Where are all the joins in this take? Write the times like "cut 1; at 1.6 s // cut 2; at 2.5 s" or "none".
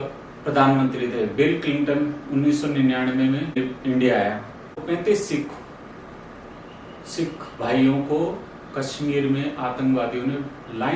cut 1; at 3.6 s // cut 2; at 4.8 s